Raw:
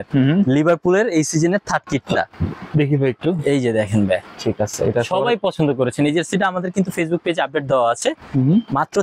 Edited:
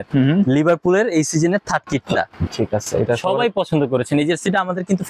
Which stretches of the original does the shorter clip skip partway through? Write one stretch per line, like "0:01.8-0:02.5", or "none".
0:02.4-0:04.3

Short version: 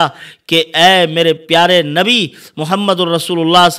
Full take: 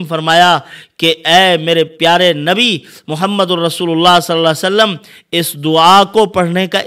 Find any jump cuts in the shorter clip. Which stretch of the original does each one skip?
none

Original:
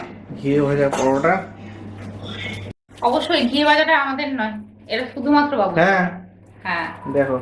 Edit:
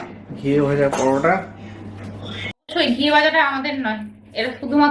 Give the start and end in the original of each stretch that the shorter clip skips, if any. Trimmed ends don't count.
0:02.7-0:03.2

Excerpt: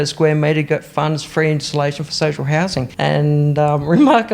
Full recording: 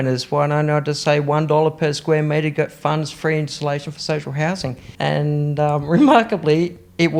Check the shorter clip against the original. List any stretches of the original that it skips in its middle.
0:04.8-0:04.9

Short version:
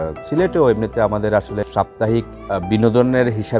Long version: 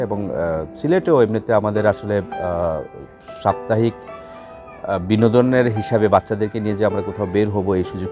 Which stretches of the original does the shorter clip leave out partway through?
0:02.1-0:03.3
0:04.1-0:04.8

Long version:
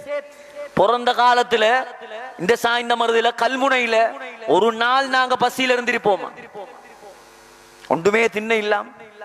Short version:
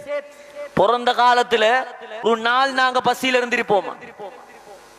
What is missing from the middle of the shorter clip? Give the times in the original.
0:02.2-0:04.6

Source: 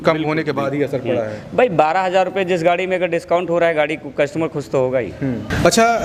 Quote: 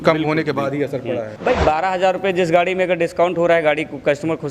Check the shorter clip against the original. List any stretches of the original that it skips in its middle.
0:01.3-0:01.4

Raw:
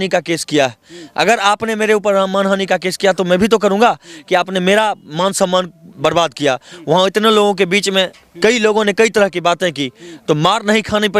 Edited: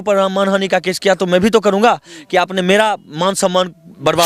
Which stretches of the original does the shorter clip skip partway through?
none

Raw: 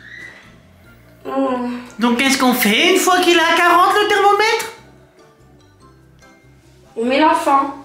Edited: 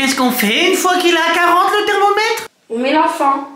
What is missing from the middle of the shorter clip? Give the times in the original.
0:04.8-0:06.8

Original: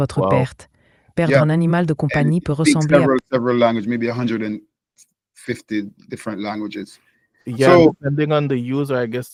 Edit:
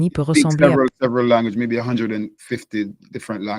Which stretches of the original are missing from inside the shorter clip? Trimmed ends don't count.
0:04.7-0:05.3

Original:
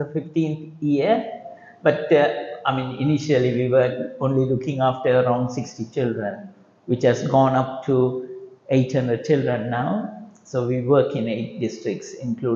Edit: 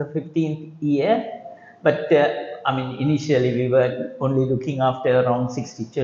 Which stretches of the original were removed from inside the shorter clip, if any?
none

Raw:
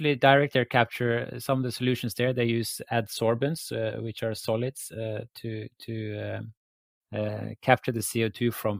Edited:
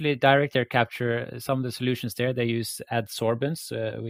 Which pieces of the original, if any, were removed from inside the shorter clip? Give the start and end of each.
none

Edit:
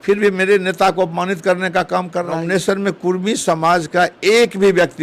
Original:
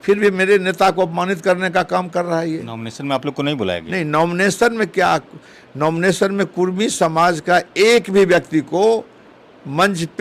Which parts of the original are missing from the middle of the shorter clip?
0:02.4-0:05.9

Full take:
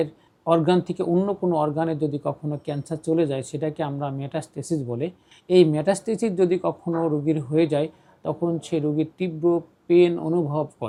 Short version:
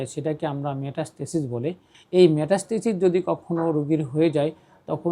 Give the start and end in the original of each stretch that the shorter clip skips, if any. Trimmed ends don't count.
none

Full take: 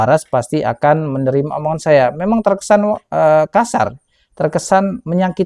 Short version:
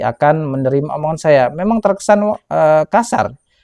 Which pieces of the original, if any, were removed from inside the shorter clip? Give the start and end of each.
none

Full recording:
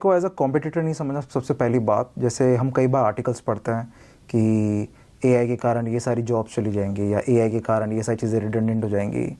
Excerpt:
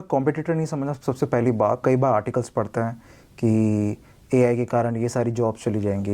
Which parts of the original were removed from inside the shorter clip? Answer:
0:02.1-0:02.7

